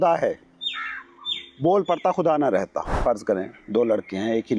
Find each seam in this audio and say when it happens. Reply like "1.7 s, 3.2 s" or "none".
2.9 s